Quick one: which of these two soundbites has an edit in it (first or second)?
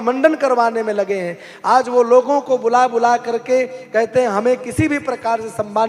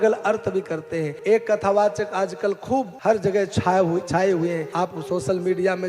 second